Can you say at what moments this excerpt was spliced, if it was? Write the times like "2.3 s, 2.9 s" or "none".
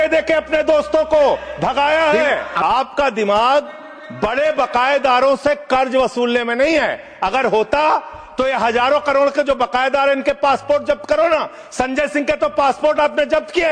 none